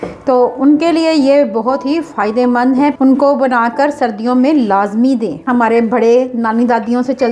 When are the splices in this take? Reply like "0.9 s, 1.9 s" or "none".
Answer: 2.9 s, 5.5 s